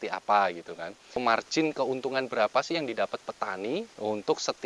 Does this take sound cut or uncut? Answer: cut